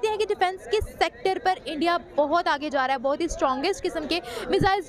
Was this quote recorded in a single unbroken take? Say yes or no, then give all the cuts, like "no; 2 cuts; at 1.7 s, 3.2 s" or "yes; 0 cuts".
yes; 0 cuts